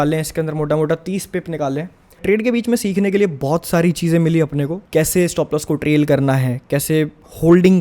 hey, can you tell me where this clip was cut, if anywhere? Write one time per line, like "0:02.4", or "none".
0:02.2
0:04.8